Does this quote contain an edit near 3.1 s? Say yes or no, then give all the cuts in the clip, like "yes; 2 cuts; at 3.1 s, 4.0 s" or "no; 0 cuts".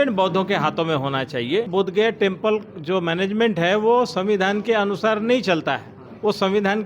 no; 1 cut; at 1.7 s